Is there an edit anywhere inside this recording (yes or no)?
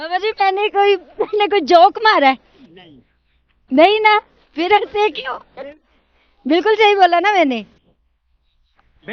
no